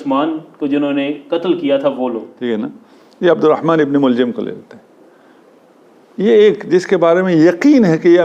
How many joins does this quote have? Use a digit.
1